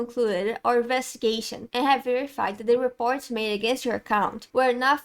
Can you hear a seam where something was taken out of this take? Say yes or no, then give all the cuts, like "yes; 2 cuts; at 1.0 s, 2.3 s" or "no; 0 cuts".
no; 0 cuts